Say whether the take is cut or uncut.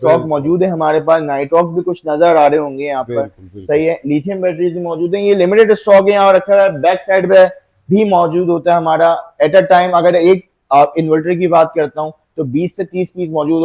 uncut